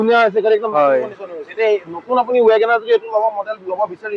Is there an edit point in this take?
no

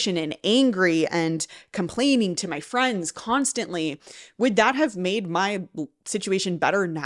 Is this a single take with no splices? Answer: yes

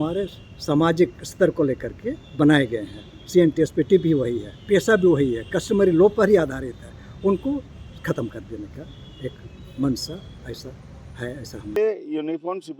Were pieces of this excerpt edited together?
yes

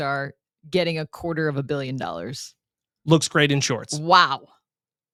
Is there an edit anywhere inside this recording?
no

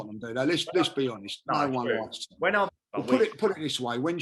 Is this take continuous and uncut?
no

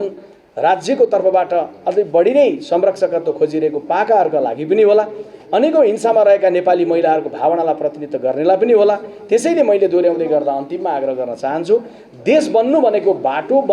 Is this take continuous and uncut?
yes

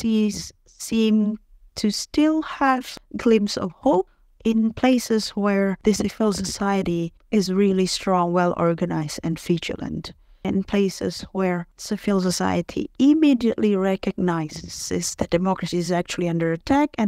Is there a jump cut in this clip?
yes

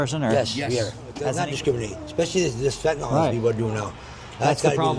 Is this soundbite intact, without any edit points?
no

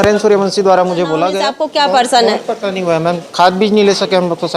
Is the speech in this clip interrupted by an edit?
yes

